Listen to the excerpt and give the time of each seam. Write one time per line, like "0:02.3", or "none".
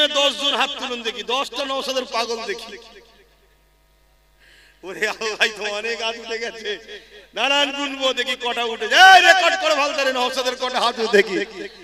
none

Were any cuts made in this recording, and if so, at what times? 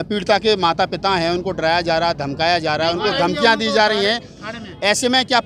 none

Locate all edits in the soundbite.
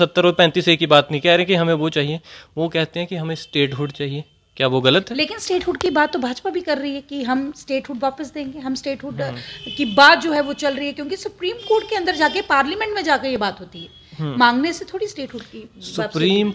none

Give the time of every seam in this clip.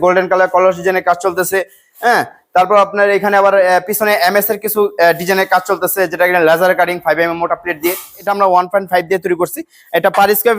0:08.2

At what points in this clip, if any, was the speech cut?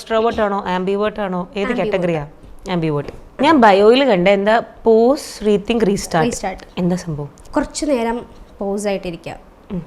0:03.4
0:07.3

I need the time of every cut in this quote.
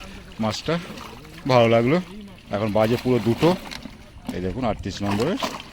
none

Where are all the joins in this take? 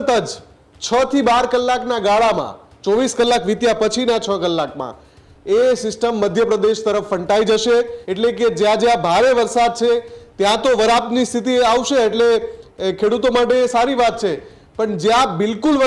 0:08.0

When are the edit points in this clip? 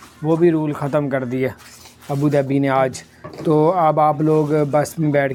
none

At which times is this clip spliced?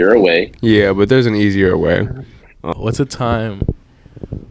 0:02.7

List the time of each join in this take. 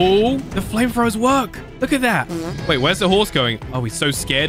none

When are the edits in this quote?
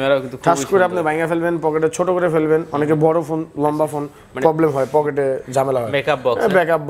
none

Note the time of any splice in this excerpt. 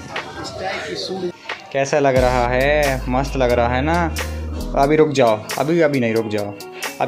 0:01.3

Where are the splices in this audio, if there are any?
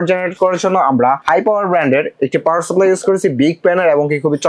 0:01.2

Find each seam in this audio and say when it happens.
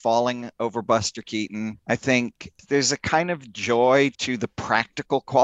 none

